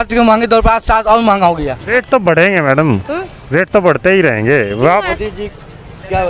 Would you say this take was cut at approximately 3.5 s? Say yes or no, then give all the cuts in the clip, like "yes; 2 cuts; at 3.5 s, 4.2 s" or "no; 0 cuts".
no; 2 cuts; at 1.7 s, 5.1 s